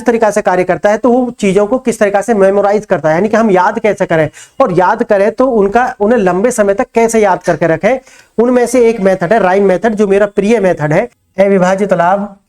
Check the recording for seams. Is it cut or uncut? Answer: cut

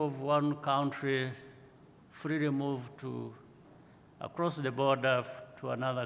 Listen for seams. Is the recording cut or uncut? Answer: uncut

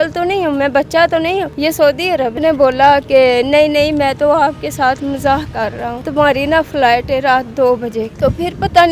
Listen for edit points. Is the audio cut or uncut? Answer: cut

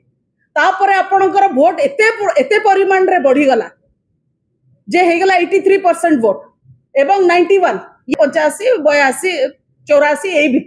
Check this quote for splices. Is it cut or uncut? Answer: cut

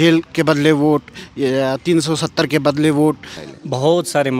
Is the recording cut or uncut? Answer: cut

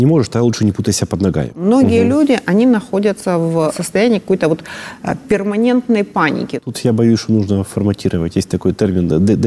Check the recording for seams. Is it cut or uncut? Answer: cut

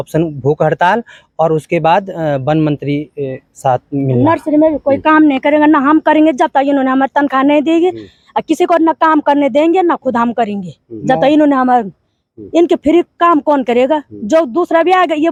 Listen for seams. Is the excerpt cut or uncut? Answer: uncut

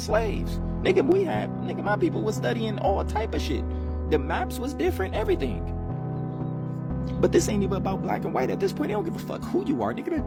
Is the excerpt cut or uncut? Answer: uncut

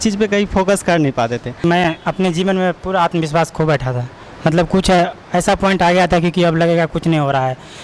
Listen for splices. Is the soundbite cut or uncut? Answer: cut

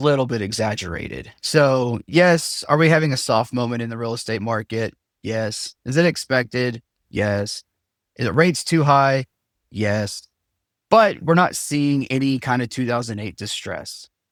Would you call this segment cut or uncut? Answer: uncut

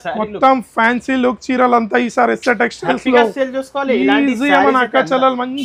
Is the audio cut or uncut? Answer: uncut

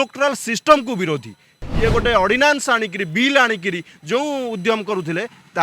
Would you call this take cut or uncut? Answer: cut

